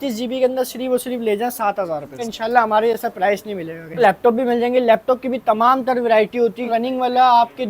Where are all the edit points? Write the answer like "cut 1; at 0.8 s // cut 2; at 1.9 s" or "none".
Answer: cut 1; at 2.2 s // cut 2; at 4.0 s // cut 3; at 6.6 s